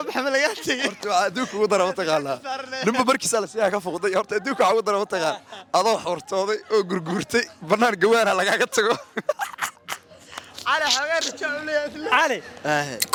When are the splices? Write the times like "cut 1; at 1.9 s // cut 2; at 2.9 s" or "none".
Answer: none